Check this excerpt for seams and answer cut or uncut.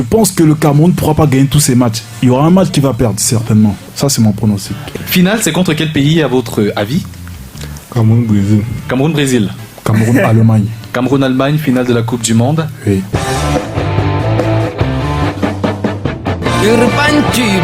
cut